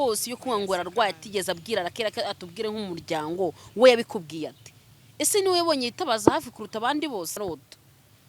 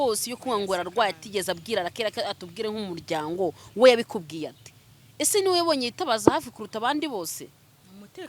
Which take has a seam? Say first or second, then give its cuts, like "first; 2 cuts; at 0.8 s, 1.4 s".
first; 1 cut; at 7.4 s